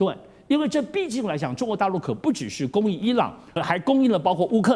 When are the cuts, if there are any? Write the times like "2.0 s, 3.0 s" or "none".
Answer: 3.5 s